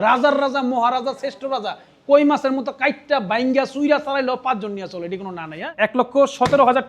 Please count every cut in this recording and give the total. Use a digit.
1